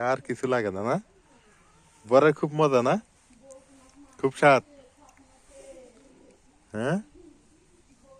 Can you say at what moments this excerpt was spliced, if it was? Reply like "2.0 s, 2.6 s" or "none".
none